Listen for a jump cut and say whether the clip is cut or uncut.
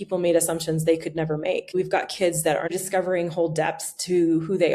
cut